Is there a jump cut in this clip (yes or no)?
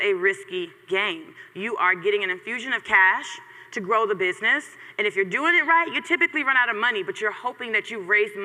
no